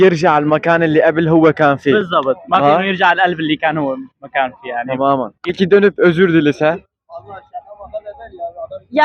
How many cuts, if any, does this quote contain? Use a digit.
1